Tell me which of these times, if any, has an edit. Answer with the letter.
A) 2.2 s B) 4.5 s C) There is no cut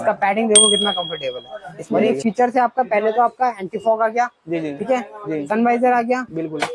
A